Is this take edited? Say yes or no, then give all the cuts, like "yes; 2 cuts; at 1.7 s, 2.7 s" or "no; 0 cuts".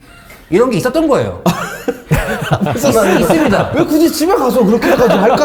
no; 0 cuts